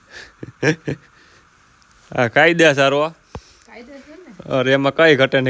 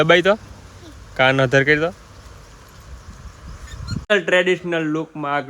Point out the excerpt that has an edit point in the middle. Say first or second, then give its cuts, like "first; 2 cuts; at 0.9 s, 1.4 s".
second; 1 cut; at 4.1 s